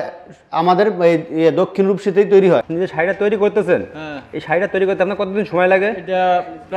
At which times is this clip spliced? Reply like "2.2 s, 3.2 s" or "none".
2.7 s

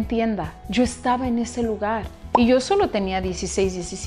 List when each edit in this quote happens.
2.2 s

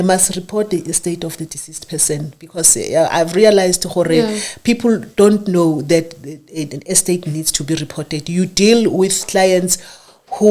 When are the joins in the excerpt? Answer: none

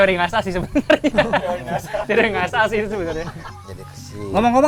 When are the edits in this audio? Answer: none

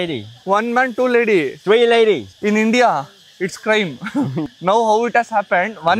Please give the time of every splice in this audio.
2.3 s, 4.5 s

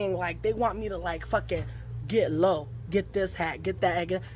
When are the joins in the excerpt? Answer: 3.1 s

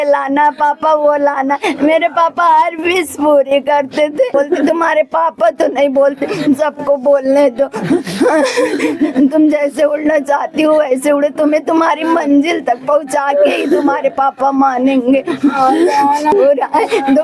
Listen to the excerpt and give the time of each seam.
4.3 s, 16.3 s

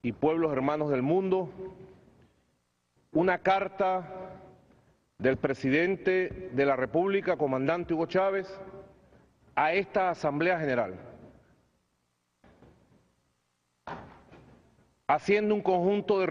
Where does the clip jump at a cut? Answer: 0.9 s

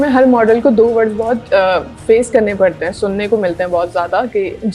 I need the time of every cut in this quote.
none

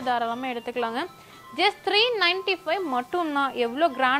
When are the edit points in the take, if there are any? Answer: none

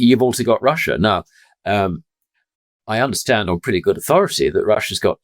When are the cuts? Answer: none

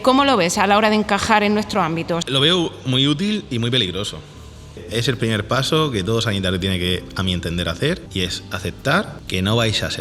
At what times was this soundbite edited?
2.2 s, 4.8 s, 8.1 s, 9.2 s

